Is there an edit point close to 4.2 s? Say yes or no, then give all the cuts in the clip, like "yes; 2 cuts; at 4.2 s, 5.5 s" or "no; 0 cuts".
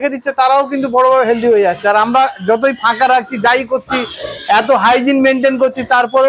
no; 0 cuts